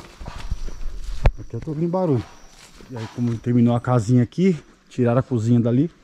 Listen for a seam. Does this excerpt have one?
yes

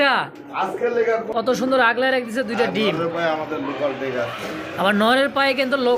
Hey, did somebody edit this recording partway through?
yes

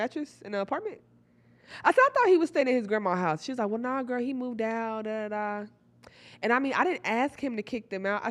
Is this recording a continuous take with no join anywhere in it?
yes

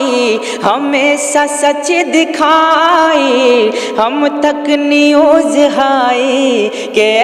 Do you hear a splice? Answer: no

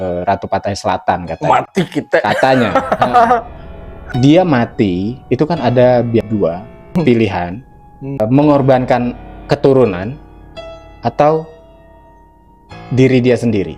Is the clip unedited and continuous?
no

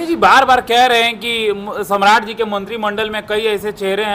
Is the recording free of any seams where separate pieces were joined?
yes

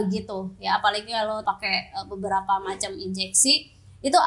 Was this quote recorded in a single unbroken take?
no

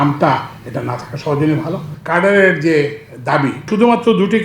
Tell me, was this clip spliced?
yes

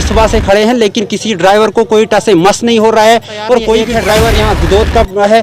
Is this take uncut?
no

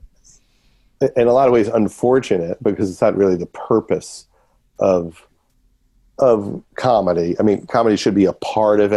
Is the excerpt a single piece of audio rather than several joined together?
yes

